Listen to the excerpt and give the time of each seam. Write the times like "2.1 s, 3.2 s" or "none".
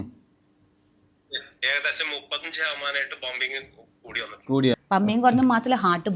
4.8 s